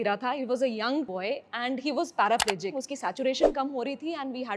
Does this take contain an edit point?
yes; 2 cuts; at 1.1 s, 2.9 s

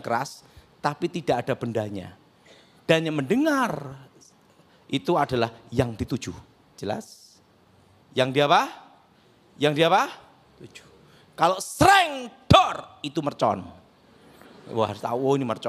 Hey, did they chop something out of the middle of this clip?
no; 0 cuts

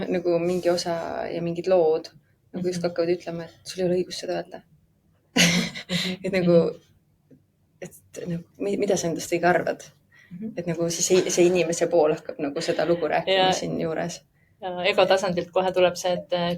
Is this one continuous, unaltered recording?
yes; 0 cuts

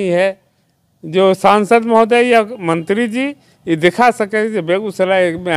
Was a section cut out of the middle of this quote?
no; 0 cuts

